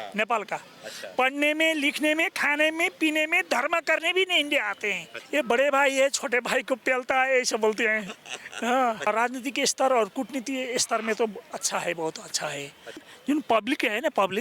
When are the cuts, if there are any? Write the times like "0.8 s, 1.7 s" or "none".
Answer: 5.1 s, 9.1 s, 13.0 s